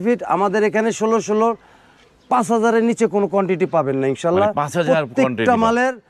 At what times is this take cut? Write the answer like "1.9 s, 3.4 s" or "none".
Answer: none